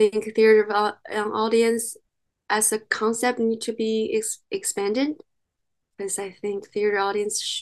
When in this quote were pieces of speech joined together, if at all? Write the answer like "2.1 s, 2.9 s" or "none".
none

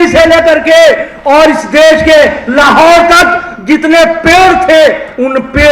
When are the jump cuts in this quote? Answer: none

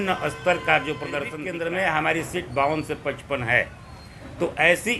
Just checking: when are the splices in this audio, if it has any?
1.4 s

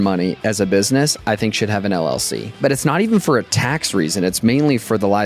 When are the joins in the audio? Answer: 2.5 s

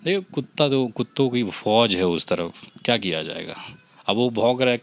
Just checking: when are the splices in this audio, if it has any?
none

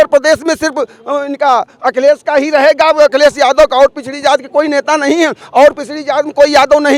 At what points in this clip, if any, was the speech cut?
none

